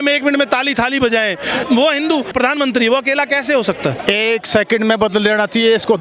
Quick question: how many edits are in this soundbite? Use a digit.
3